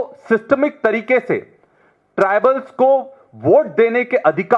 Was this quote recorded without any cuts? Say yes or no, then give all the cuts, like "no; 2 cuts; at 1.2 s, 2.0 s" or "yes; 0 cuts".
yes; 0 cuts